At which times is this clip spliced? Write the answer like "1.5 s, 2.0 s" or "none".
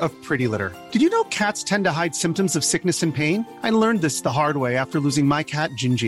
none